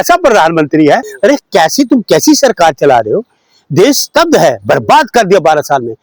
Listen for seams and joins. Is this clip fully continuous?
no; 1 cut; at 1.1 s

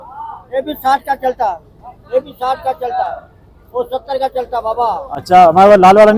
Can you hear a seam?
no; 0 cuts

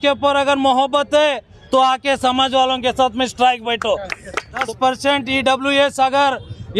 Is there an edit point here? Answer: yes; 2 cuts; at 1.5 s, 4.6 s

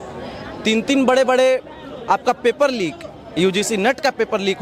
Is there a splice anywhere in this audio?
no; 0 cuts

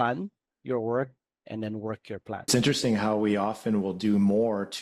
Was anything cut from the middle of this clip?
yes; 1 cut; at 2.5 s

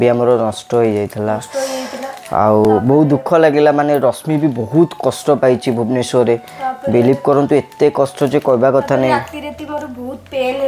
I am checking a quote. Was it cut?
no; 0 cuts

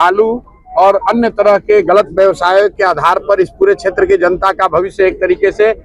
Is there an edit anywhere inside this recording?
no; 0 cuts

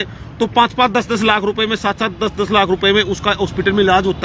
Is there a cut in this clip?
no; 0 cuts

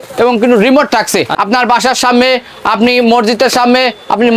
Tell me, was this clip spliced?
yes; 1 cut; at 1.3 s

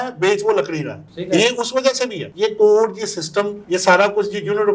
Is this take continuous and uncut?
yes; 0 cuts

